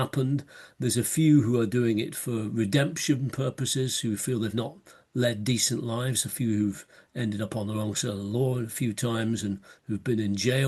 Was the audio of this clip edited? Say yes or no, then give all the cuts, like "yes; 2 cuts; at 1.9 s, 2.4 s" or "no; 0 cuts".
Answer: no; 0 cuts